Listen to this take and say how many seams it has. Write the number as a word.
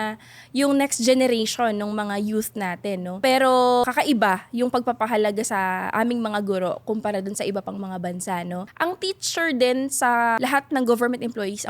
two